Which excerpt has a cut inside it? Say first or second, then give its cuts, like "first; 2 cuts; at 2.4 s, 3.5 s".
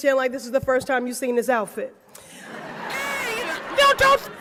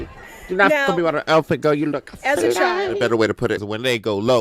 second; 1 cut; at 3.0 s